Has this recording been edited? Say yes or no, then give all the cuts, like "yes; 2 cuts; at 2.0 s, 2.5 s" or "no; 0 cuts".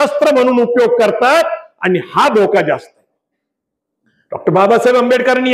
no; 0 cuts